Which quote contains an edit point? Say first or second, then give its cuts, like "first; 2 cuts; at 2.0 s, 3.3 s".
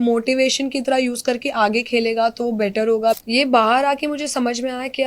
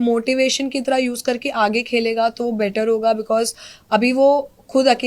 first; 1 cut; at 3.2 s